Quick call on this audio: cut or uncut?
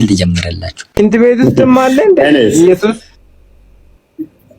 cut